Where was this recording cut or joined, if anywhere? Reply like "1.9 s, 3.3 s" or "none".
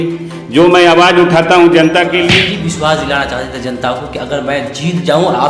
2.4 s